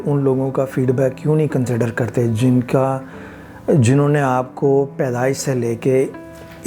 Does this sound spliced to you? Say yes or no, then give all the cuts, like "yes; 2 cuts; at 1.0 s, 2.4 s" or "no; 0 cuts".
no; 0 cuts